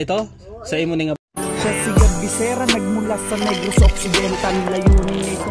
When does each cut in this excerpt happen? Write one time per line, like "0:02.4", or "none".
0:01.2

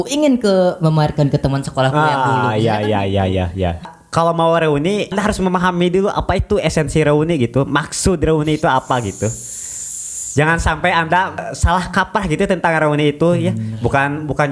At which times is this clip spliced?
0:03.9
0:05.1
0:11.4

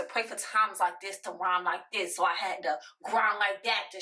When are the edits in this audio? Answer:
none

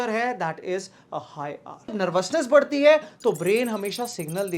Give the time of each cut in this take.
0:01.9

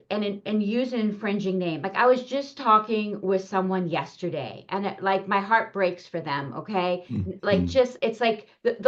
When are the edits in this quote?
none

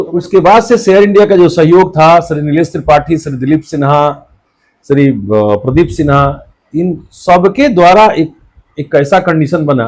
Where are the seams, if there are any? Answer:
none

